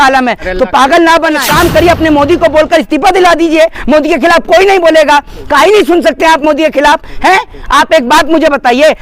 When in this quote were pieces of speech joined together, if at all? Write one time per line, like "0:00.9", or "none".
0:01.5